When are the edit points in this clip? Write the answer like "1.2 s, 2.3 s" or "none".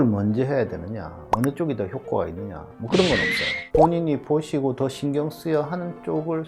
none